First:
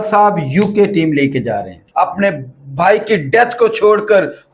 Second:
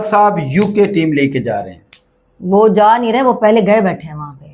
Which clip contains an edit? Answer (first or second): first